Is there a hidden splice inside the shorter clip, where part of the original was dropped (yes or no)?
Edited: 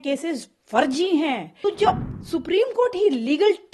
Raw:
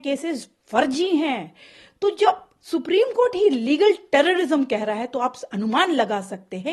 yes